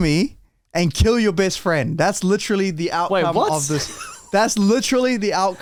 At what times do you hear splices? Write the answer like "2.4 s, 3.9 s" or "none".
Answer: none